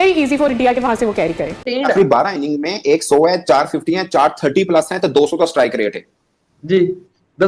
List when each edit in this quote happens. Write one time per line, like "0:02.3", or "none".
0:01.7